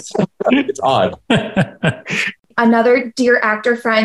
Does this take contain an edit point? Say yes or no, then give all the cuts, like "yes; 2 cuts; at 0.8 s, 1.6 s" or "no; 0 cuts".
yes; 1 cut; at 2.5 s